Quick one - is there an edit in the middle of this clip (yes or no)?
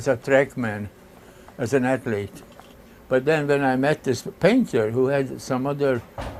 no